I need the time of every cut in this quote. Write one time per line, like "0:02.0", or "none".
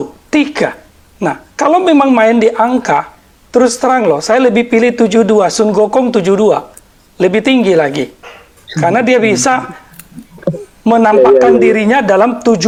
none